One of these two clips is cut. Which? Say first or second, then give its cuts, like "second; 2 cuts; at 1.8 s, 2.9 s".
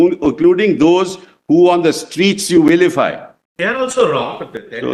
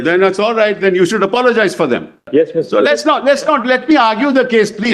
second; 1 cut; at 2.2 s